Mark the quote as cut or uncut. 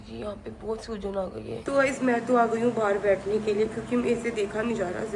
cut